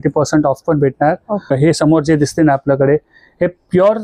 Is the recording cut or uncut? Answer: cut